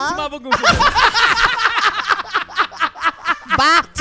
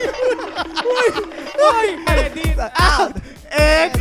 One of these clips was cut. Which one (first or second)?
second